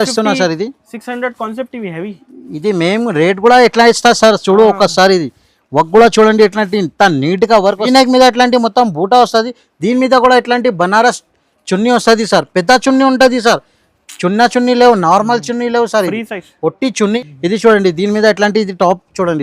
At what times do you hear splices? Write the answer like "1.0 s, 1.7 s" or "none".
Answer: 7.9 s, 17.2 s